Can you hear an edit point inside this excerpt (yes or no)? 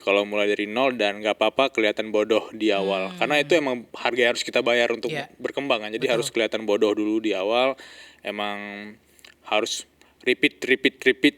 no